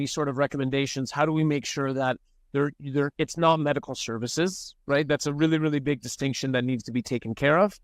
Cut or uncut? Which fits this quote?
uncut